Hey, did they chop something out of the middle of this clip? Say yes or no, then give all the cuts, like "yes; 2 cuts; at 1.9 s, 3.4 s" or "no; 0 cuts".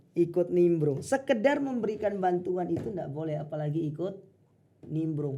no; 0 cuts